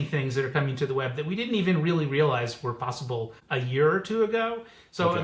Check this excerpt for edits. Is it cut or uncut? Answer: cut